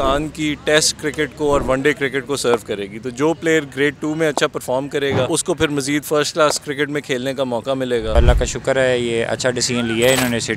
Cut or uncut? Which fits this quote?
cut